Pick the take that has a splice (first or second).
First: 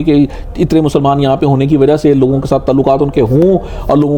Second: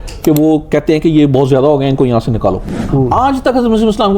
second